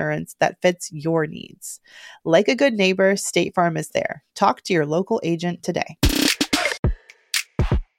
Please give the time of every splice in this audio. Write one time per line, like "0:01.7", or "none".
0:06.9